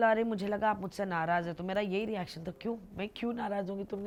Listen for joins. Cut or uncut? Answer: uncut